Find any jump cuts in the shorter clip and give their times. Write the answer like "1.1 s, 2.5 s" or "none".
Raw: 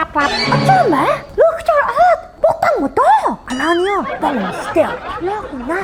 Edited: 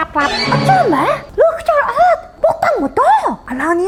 none